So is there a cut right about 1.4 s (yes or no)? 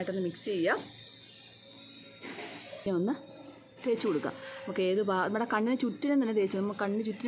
no